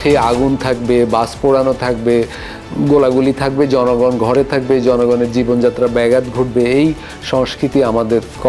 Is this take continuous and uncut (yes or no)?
yes